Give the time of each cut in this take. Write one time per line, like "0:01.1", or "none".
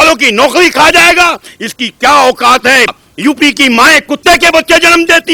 0:03.1